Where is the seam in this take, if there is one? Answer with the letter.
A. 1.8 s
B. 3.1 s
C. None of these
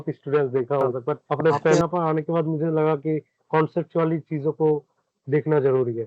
A